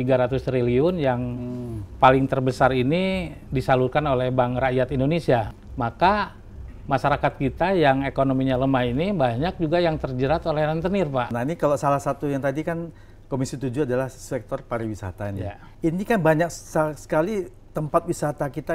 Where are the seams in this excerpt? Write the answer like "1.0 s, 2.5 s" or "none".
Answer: 5.6 s, 11.3 s, 15.6 s